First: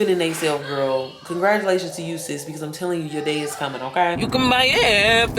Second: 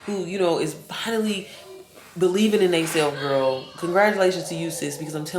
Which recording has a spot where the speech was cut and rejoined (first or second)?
first